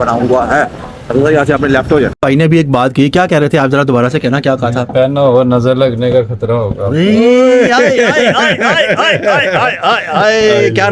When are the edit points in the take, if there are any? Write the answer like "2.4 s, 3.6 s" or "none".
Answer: 2.2 s, 7.1 s